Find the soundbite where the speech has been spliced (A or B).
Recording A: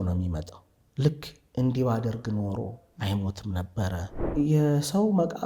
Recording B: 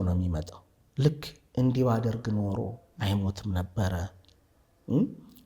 A